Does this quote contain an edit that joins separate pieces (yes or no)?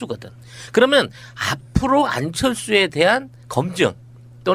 no